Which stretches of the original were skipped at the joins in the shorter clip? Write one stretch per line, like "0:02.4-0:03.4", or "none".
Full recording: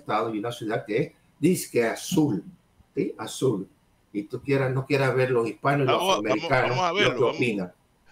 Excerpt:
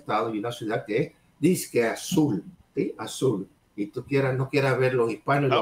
0:02.6-0:02.8
0:03.8-0:03.9